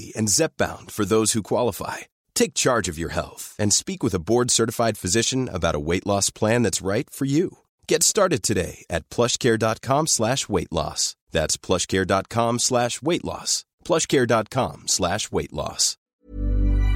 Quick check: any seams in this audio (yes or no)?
yes